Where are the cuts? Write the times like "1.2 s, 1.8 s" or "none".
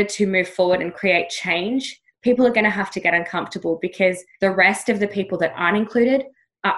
none

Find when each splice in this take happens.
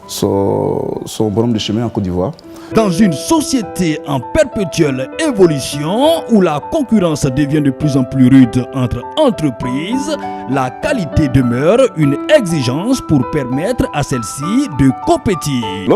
2.4 s

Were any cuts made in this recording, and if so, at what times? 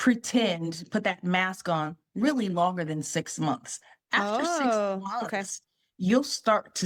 none

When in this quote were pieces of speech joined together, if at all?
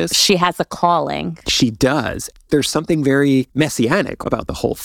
2.4 s, 3.9 s

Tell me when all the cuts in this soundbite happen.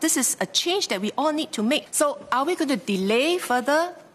1.8 s

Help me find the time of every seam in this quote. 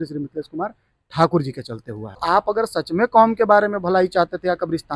2.2 s

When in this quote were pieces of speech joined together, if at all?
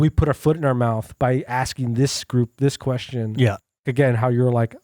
3.9 s

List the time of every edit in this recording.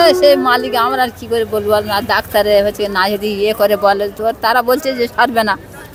none

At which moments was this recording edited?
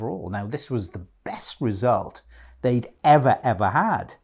none

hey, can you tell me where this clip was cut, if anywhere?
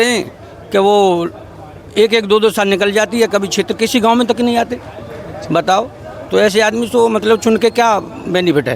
none

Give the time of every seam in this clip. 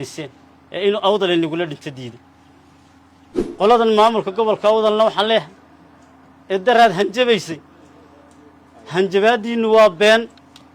3.3 s

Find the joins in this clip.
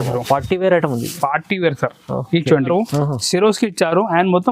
2.7 s

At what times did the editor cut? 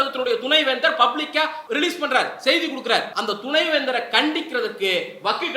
1.6 s, 3.1 s

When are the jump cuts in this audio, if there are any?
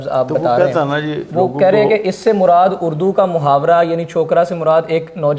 none

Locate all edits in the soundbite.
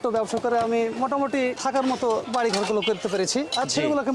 1.6 s, 2.3 s

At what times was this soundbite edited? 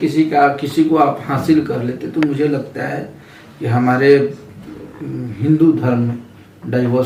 none

